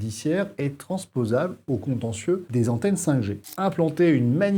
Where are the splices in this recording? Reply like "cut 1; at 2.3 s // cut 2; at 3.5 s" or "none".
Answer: cut 1; at 2.5 s // cut 2; at 3.5 s